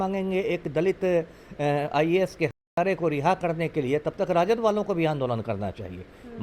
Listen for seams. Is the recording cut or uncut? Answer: uncut